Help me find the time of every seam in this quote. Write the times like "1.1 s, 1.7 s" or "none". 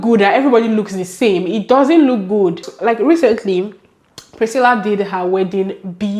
2.6 s